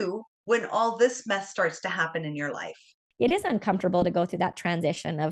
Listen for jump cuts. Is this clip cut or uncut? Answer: cut